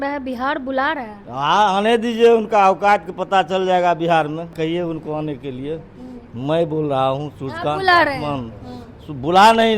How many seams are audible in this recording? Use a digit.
1